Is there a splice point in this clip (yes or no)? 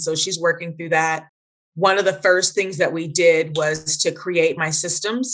no